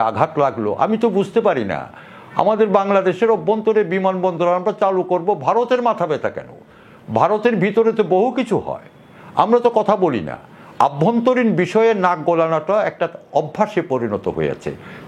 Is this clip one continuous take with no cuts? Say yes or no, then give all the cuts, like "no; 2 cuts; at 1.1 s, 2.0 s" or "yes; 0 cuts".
yes; 0 cuts